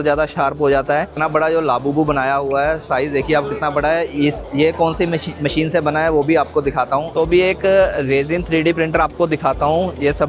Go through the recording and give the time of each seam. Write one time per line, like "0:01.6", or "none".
0:01.2
0:07.1